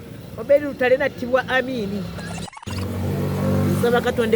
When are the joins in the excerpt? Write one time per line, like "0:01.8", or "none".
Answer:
0:02.6

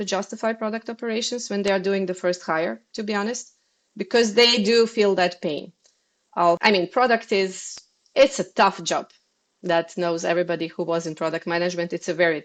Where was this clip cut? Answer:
none

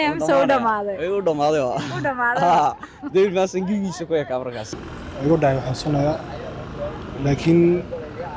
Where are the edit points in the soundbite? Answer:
0:04.9

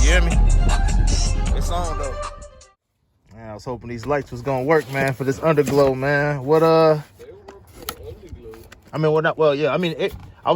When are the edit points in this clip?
0:02.5

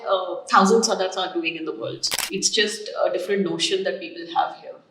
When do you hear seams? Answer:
0:02.1

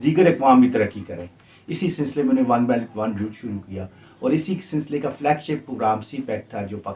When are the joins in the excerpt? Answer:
none

